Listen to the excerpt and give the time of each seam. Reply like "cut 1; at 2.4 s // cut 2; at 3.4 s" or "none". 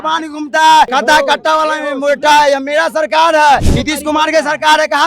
cut 1; at 0.9 s // cut 2; at 3.8 s